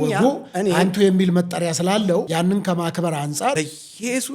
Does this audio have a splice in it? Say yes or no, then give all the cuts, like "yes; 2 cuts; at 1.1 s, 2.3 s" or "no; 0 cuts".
yes; 2 cuts; at 2.3 s, 3.6 s